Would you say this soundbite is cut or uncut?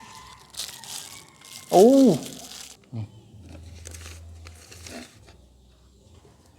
cut